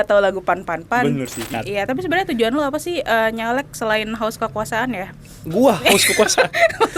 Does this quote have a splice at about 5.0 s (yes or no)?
no